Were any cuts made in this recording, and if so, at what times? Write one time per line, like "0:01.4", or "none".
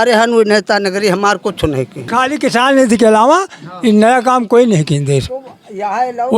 0:02.1